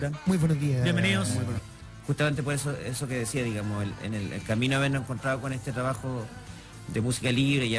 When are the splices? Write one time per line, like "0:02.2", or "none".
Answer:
none

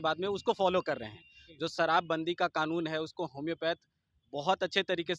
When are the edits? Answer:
none

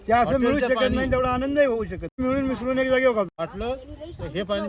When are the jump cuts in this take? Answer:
0:02.2
0:03.3

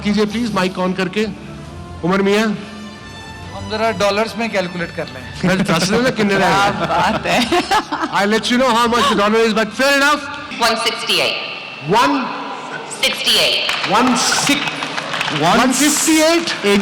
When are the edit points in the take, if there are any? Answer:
0:10.4

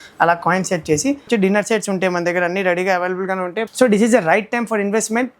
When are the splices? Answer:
0:01.3
0:03.6

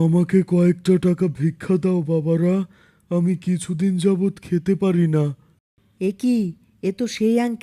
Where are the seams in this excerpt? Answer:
none

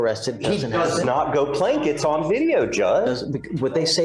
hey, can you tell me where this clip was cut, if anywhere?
none

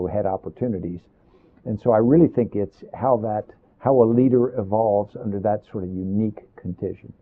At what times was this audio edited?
0:05.8

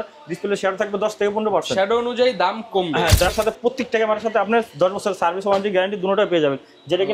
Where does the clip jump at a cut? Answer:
0:03.3

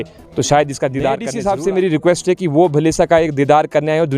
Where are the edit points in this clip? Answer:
0:01.3

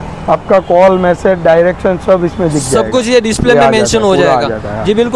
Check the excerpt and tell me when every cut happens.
none

